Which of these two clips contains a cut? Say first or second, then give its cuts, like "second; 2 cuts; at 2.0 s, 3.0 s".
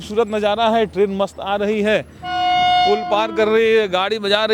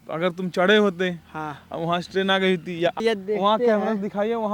second; 1 cut; at 3.0 s